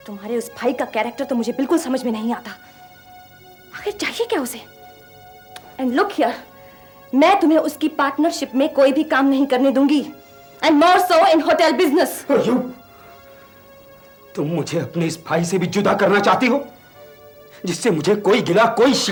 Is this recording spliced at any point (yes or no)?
no